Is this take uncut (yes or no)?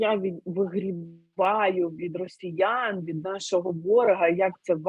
yes